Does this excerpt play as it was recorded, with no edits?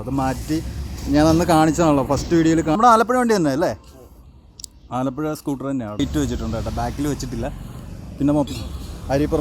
no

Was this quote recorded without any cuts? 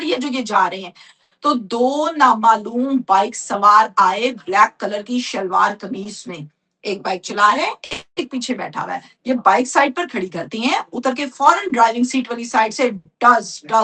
yes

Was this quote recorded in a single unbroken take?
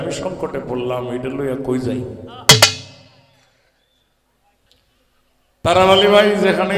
yes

